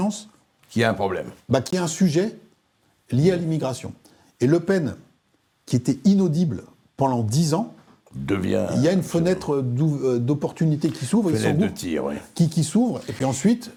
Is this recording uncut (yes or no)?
yes